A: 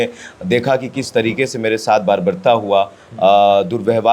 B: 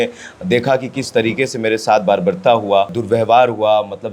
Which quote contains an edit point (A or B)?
B